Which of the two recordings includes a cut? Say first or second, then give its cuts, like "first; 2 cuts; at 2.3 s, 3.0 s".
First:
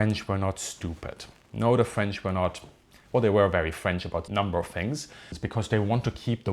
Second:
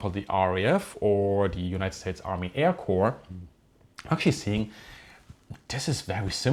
first; 2 cuts; at 4.3 s, 5.4 s